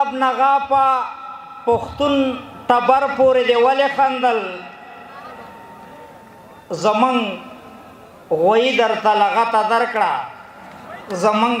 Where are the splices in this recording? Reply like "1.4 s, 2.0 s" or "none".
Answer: none

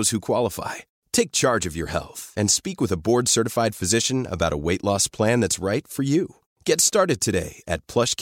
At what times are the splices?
none

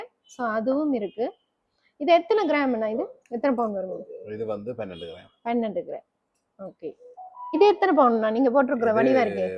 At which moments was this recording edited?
none

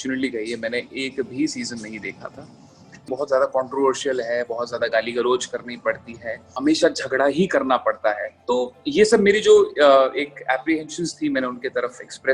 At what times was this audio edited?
3.1 s, 6.5 s, 8.3 s

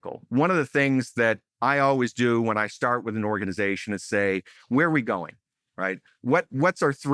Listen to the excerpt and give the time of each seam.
none

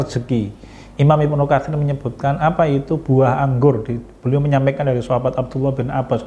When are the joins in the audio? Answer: none

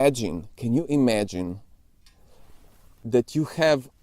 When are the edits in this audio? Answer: 2.9 s

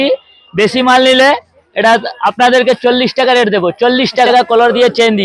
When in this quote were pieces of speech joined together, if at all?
4.3 s

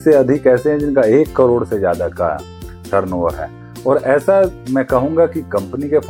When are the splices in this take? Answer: none

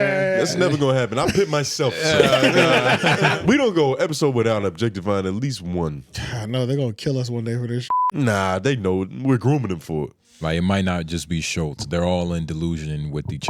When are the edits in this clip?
3.4 s, 10.2 s

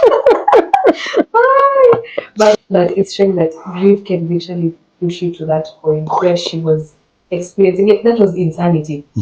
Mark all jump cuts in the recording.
2.6 s

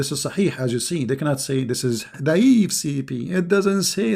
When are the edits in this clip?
2.1 s

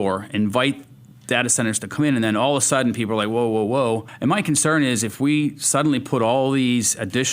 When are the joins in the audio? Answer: 4.1 s

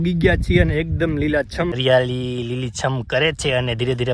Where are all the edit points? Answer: 1.8 s

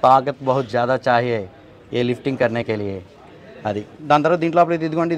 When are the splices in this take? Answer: none

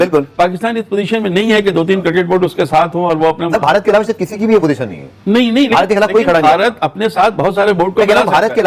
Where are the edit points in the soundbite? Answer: none

